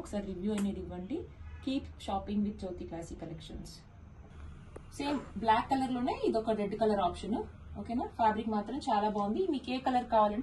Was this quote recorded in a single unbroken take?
yes; 0 cuts

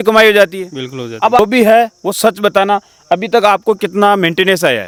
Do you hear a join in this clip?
no; 0 cuts

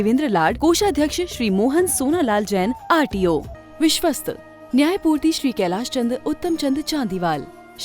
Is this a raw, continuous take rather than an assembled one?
no; 1 cut; at 3.6 s

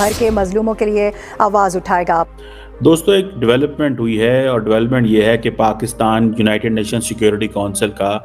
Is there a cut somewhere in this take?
yes; 1 cut; at 2.3 s

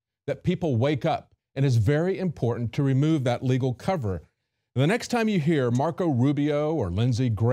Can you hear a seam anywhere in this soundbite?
no; 0 cuts

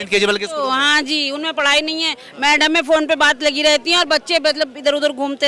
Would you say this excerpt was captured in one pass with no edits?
yes; 0 cuts

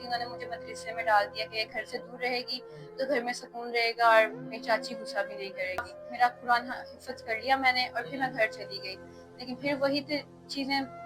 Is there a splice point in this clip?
yes; 1 cut; at 6.1 s

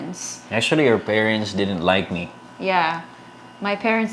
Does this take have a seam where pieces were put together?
no; 0 cuts

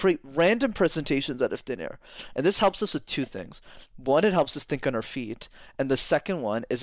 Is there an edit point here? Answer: no; 0 cuts

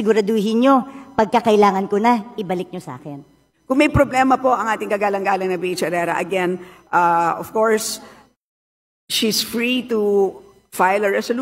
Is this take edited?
yes; 1 cut; at 3.5 s

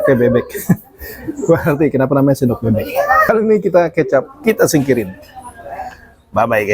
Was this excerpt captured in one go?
no; 1 cut; at 3.2 s

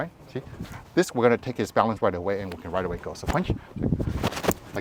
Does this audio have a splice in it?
no; 0 cuts

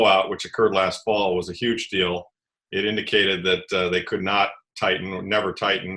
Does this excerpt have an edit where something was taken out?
no; 0 cuts

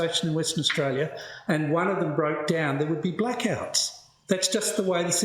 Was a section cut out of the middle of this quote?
no; 0 cuts

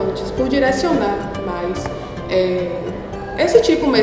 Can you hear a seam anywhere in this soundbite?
no; 0 cuts

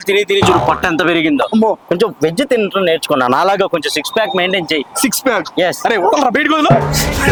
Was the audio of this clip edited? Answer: no; 0 cuts

